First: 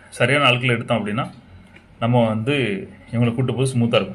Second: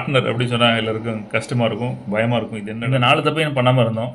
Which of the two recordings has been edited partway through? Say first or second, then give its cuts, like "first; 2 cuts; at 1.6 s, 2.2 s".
second; 1 cut; at 2.7 s